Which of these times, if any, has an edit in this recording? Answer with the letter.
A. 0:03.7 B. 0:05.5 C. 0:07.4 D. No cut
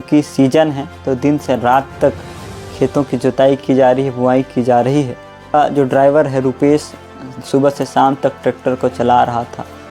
B